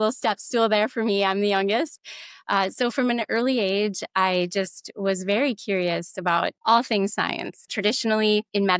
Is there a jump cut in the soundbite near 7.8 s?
yes; 2 cuts; at 6.6 s, 7.8 s

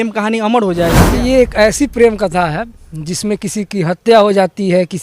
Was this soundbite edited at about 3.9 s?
no; 1 cut; at 1.0 s

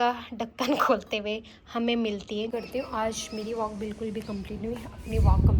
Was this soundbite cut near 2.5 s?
yes; 1 cut; at 2.5 s

